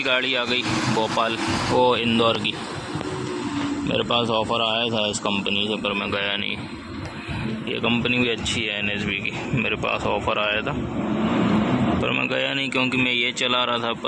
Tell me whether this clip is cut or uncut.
uncut